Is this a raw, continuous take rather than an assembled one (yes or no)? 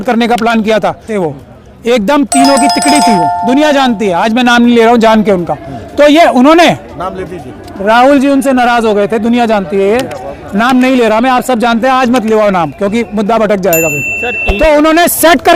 no